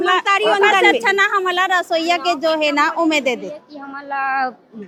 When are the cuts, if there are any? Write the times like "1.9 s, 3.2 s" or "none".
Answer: none